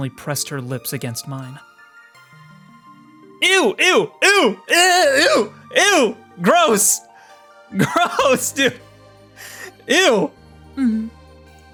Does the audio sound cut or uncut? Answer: uncut